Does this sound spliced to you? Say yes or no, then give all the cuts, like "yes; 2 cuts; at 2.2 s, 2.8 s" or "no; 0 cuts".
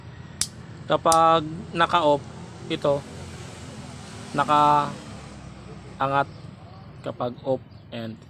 no; 0 cuts